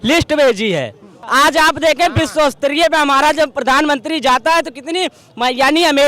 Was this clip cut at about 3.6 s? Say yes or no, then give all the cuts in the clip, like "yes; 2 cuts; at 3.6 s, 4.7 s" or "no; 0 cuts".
no; 1 cut; at 1.2 s